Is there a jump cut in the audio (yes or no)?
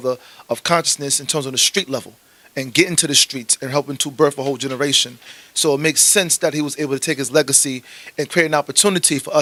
no